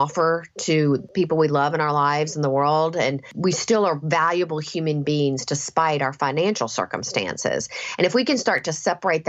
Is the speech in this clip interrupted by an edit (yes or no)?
yes